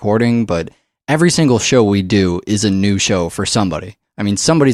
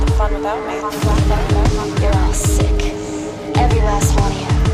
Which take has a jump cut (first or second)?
first